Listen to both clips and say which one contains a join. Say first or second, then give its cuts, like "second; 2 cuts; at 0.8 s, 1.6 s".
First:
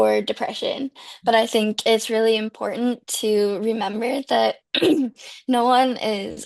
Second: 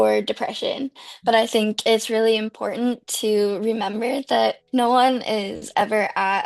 second; 1 cut; at 4.6 s